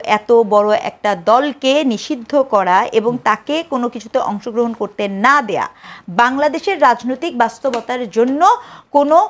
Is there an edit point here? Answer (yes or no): no